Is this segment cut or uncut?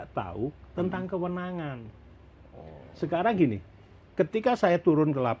uncut